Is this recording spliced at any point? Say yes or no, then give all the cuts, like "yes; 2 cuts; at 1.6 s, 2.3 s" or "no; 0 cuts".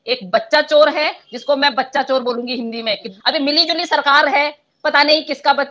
yes; 1 cut; at 3.1 s